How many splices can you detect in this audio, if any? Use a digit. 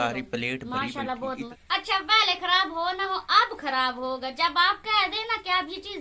1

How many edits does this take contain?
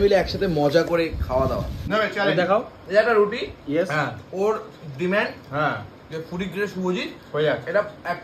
1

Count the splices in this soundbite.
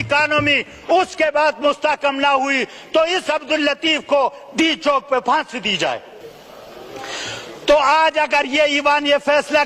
1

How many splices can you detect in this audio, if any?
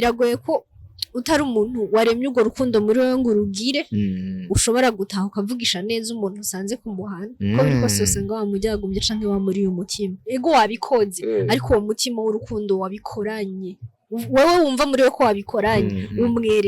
1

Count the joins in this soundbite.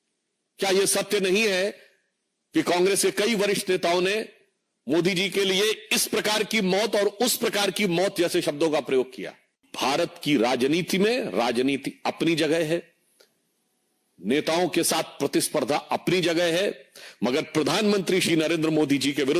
1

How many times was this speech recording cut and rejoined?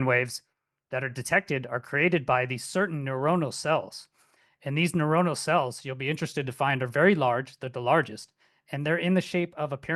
0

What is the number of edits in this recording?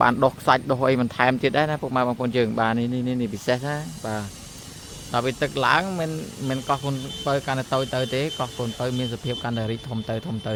0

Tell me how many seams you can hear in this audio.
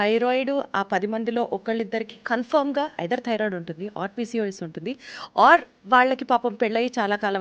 0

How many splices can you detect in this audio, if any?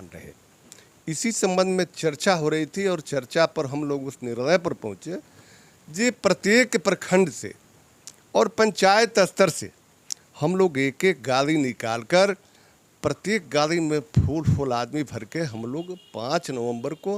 0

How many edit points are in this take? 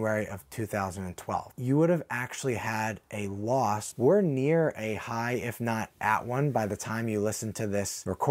1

